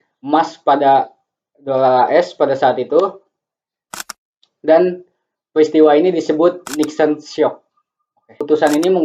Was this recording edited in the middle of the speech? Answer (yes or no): no